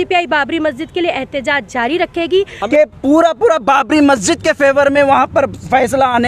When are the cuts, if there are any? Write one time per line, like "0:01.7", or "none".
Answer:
0:02.6